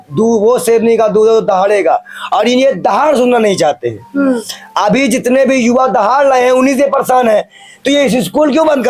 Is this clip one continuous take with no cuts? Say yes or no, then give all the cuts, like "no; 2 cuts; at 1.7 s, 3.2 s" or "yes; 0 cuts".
yes; 0 cuts